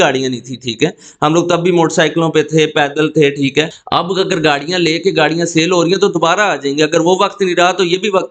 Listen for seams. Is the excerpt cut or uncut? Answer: cut